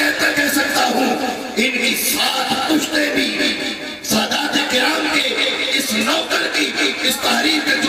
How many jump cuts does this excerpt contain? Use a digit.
0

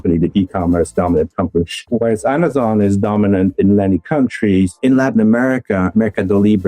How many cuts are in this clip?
2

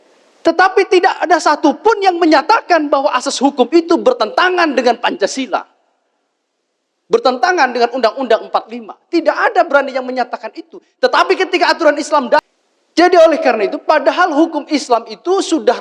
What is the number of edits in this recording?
1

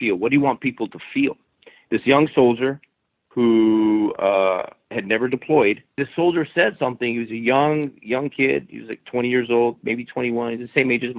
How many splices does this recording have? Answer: 2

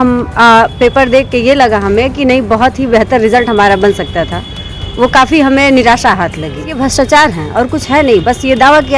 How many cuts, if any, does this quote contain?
1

